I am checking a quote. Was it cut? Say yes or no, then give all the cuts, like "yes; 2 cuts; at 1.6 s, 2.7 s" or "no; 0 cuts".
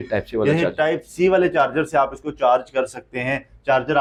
no; 0 cuts